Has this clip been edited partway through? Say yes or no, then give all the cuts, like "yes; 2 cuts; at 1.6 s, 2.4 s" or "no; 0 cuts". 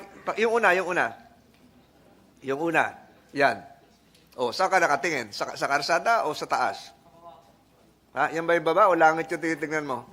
no; 0 cuts